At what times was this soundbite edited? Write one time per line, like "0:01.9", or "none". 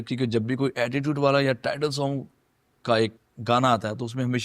0:03.2